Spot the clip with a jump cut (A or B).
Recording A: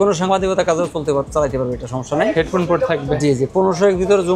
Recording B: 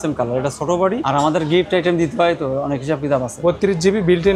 B